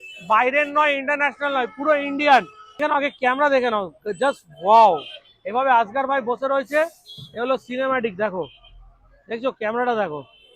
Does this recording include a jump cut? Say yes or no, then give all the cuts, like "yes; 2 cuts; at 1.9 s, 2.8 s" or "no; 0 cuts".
yes; 1 cut; at 2.8 s